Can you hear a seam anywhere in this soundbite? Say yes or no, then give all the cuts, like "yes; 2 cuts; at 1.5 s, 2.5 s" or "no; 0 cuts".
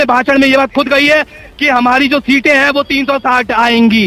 no; 0 cuts